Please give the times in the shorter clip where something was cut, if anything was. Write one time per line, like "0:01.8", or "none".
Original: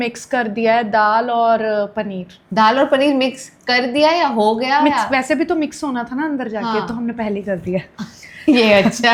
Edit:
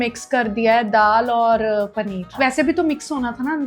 0:02.3